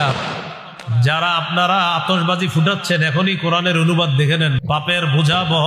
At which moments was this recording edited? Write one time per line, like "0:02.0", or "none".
0:04.6

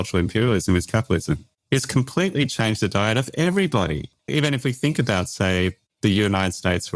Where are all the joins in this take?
0:04.1

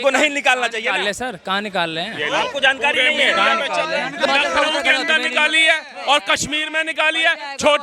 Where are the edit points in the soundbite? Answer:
0:04.3

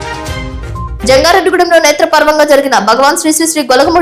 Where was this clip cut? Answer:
0:00.9

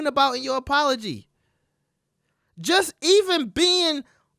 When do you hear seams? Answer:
none

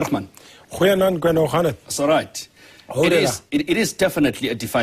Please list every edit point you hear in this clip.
0:02.2

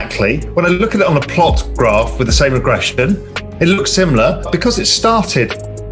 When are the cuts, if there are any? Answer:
0:04.5

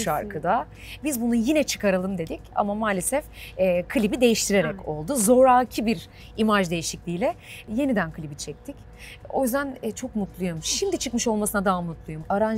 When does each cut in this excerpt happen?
none

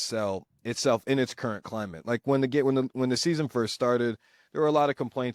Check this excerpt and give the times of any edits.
none

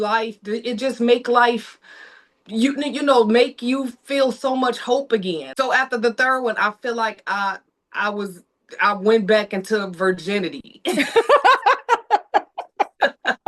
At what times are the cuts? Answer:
0:05.5

